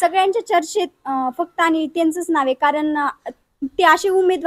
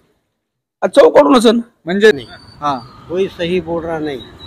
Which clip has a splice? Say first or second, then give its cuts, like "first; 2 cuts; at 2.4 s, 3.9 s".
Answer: second; 1 cut; at 2.2 s